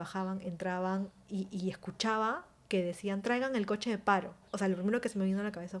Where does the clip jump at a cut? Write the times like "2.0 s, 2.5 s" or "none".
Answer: 4.4 s